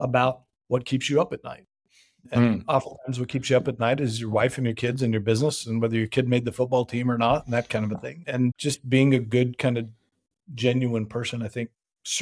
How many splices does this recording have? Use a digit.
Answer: 1